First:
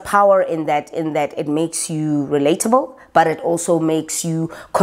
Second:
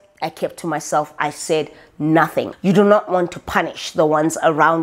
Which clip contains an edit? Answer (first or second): second